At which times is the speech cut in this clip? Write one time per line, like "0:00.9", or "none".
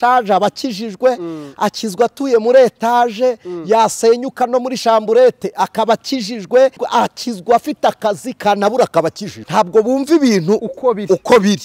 0:06.8
0:09.3